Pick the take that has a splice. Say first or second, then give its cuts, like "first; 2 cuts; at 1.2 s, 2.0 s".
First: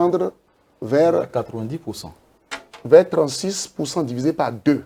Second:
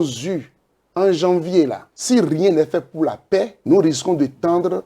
second; 2 cuts; at 1.9 s, 3.5 s